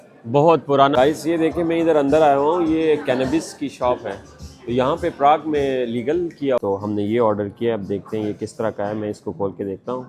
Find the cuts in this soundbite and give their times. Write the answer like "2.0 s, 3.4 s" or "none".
0.9 s, 6.6 s